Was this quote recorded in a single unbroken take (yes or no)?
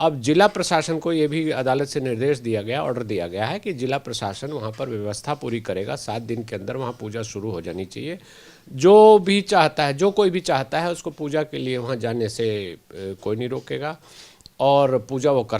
yes